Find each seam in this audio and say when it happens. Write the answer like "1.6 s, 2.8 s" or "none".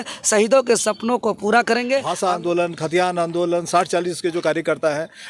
2.1 s